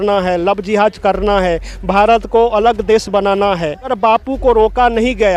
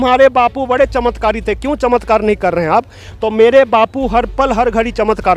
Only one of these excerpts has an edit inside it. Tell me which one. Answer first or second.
first